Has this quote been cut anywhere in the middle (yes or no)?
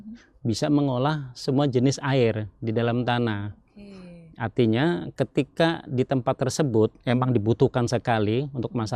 no